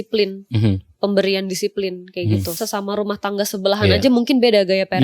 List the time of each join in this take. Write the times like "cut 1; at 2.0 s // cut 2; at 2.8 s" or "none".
cut 1; at 2.6 s